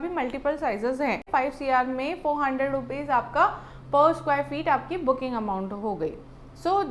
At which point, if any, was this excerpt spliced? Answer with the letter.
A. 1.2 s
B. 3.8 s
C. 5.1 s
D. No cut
A